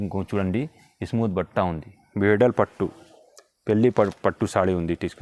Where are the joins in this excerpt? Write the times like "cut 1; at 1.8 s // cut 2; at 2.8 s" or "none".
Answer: none